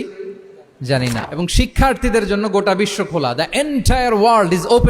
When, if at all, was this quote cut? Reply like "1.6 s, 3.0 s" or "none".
1.2 s

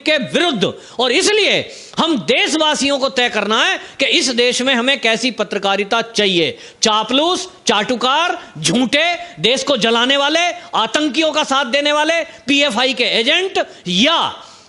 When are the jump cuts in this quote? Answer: none

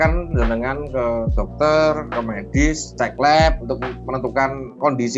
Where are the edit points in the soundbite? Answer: none

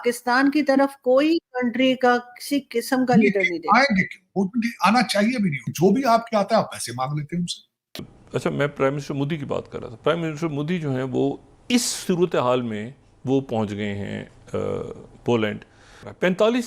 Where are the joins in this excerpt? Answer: none

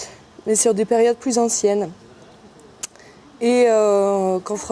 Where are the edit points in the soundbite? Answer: 1.6 s

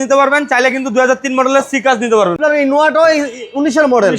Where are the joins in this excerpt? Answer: 2.4 s

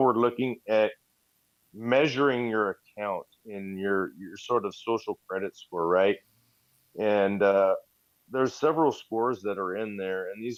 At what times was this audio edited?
none

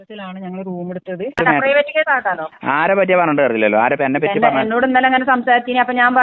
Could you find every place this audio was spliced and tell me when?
1.3 s

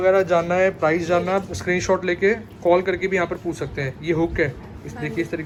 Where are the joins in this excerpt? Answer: none

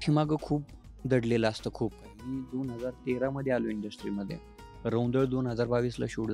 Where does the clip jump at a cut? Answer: none

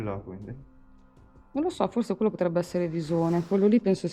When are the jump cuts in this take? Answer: none

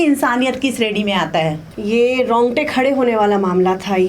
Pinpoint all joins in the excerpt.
1.6 s

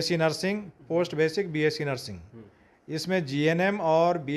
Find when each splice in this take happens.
none

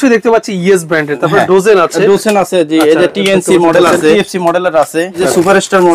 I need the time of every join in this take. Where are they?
4.2 s, 5.2 s

